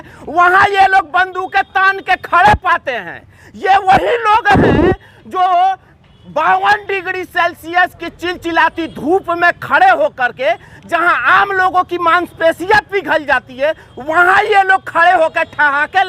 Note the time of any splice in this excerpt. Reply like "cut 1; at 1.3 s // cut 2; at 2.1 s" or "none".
none